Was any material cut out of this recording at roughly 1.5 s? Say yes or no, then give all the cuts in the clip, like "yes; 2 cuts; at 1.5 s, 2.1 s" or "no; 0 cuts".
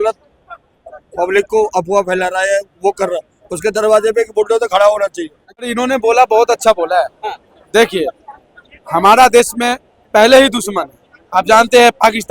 no; 1 cut; at 5.7 s